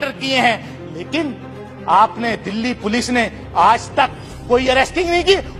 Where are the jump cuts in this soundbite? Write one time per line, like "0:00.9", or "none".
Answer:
none